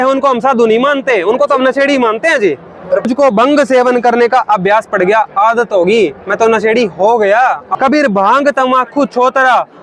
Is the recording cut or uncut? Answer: cut